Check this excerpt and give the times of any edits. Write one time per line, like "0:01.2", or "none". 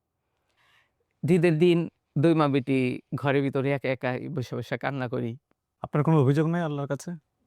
0:05.7